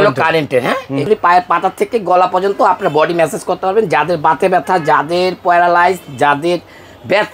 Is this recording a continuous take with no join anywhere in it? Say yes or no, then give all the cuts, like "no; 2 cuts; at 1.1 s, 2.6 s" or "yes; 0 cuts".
no; 1 cut; at 1.0 s